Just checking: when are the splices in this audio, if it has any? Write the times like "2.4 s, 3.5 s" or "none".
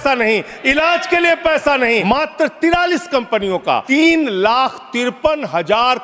2.0 s, 3.8 s